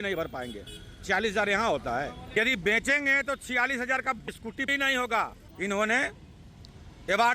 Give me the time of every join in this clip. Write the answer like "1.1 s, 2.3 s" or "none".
2.3 s, 5.4 s